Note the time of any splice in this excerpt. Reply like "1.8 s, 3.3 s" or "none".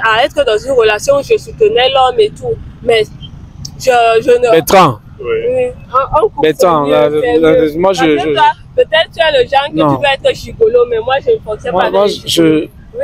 none